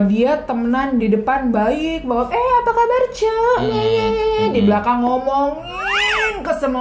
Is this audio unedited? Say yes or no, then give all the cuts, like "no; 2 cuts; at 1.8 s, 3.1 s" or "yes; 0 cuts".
yes; 0 cuts